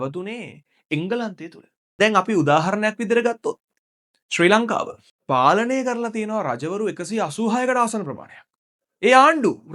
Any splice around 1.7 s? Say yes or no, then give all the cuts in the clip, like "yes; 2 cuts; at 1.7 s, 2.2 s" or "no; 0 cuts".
yes; 1 cut; at 1.7 s